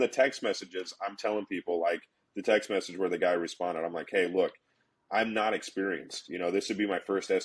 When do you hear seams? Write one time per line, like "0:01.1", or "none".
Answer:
none